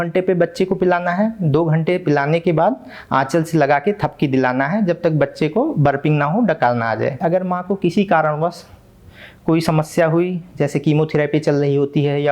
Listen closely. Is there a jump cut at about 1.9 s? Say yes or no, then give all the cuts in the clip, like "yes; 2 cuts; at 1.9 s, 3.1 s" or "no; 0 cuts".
no; 1 cut; at 7.1 s